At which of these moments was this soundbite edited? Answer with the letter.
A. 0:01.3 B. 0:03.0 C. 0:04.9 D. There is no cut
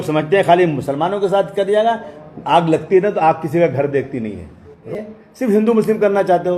C